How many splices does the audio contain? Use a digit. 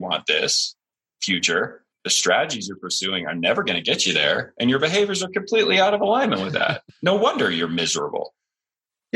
2